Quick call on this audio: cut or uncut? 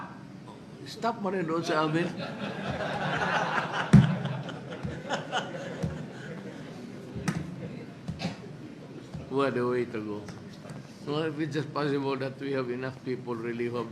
uncut